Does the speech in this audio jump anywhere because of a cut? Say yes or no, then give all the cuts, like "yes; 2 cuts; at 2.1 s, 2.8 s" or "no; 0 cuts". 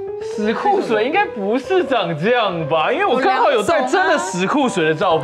no; 0 cuts